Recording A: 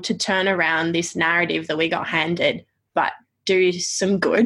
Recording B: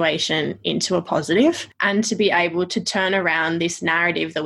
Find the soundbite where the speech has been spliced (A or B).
B